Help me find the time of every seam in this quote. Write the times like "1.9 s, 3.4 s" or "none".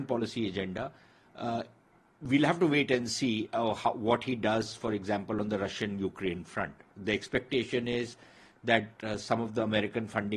none